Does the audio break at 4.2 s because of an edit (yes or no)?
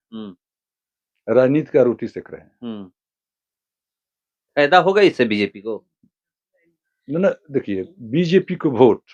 no